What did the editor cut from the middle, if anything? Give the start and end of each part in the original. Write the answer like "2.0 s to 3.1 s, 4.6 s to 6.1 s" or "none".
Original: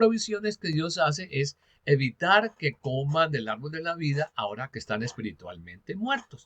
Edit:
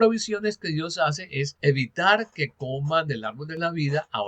1.5 s to 1.8 s

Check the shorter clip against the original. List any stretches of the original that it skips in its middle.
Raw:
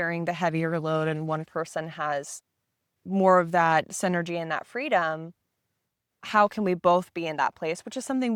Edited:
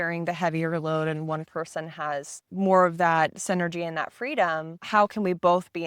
2.4 s to 2.9 s, 5.3 s to 6.2 s

